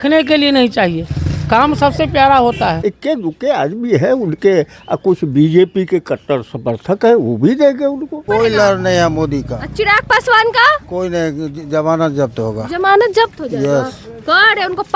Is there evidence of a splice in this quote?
yes; 2 cuts; at 2.8 s, 8.2 s

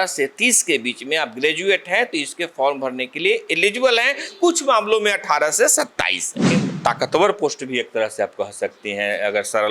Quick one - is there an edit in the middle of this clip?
yes; 1 cut; at 6.5 s

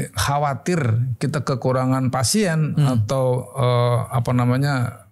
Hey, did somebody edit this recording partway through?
no; 0 cuts

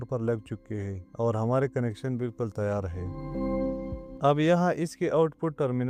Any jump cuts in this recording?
no; 0 cuts

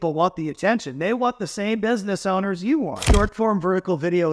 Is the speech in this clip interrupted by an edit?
yes; 1 cut; at 3.0 s

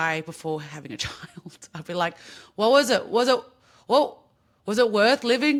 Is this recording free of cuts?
yes; 0 cuts

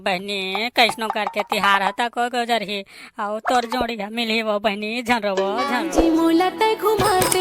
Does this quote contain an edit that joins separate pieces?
yes; 1 cut; at 5.8 s

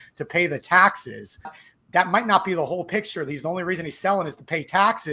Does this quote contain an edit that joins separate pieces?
yes; 1 cut; at 1.7 s

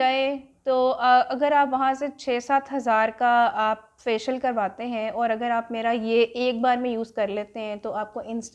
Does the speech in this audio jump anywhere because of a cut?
no; 0 cuts

